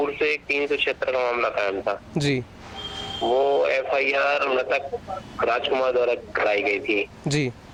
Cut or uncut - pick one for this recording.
uncut